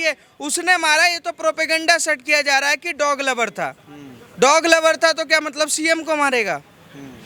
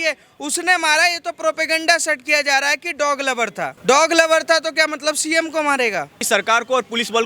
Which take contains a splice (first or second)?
second